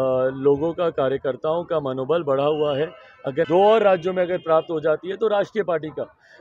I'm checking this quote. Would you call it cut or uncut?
cut